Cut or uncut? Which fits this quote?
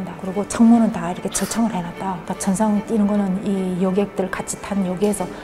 cut